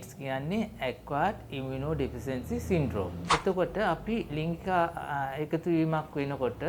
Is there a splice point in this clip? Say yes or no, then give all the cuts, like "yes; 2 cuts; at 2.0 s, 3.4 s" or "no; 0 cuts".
yes; 1 cut; at 3.2 s